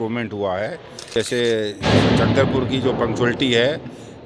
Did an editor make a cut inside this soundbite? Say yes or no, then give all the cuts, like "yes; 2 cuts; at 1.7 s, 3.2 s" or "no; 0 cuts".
yes; 1 cut; at 1.2 s